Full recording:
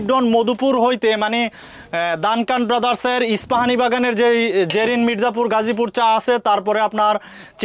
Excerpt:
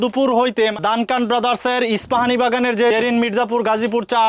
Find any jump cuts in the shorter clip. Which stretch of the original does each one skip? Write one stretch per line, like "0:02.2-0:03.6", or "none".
0:01.2-0:02.2
0:04.3-0:04.8